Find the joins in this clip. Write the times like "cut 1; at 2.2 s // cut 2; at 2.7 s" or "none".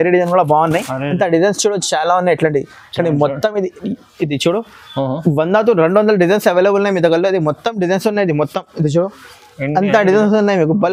none